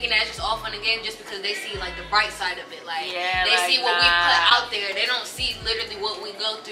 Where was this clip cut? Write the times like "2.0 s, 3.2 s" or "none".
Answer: none